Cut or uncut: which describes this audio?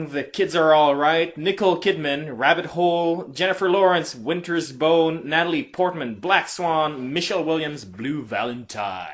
cut